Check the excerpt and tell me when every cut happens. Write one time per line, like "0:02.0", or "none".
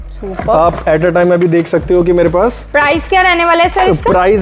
none